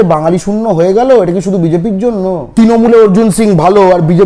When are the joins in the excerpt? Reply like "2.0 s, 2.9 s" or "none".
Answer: none